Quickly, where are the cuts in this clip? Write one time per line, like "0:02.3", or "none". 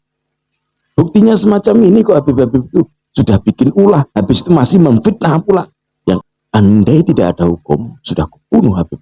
0:06.2